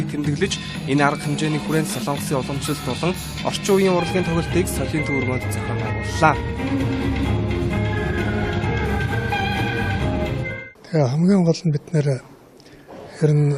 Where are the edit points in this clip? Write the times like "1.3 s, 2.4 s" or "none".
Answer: 7.7 s